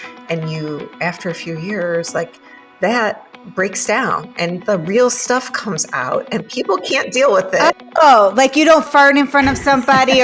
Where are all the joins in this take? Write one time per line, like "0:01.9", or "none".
0:08.9